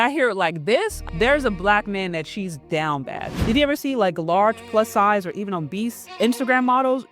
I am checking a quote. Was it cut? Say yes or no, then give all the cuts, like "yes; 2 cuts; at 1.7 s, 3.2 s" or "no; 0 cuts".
yes; 3 cuts; at 1.0 s, 3.4 s, 6.0 s